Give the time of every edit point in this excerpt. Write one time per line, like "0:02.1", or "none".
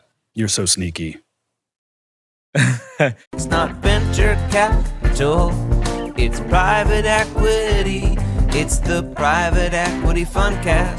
0:03.3